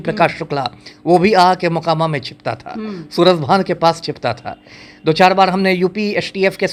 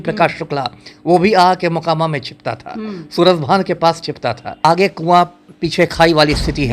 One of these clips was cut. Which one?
second; 1 cut; at 4.6 s

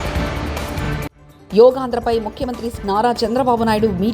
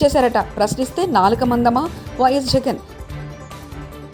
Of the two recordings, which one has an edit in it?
first; 1 cut; at 1.1 s

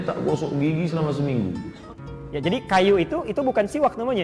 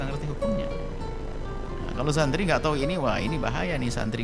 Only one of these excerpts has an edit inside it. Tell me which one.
first; 1 cut; at 1.9 s

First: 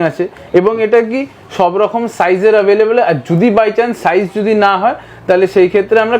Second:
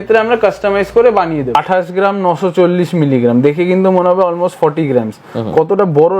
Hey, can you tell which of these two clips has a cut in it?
second; 1 cut; at 1.6 s

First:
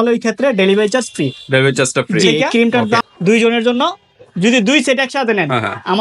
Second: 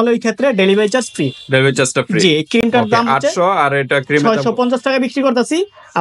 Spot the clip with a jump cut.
first; 1 cut; at 3.0 s

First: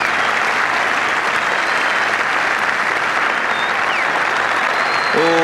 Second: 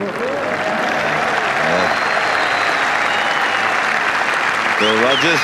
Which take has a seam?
first; 3 cuts; at 0.8 s, 2.0 s, 3.6 s

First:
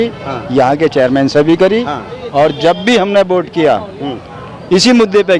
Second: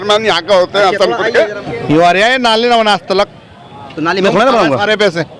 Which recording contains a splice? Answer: second; 1 cut; at 1.7 s

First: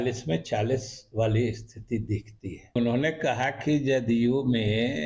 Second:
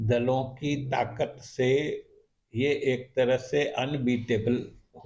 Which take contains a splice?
first; 1 cut; at 2.8 s

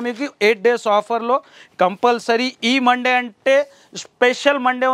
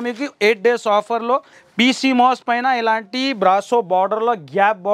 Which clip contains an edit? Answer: second; 1 cut; at 1.6 s

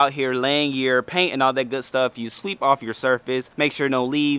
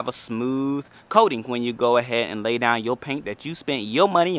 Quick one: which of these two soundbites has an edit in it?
first; 1 cut; at 3.5 s

